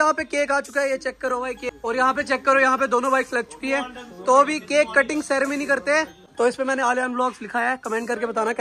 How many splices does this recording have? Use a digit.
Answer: 2